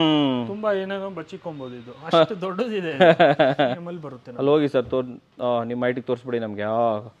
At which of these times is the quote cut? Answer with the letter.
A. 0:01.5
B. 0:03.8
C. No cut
B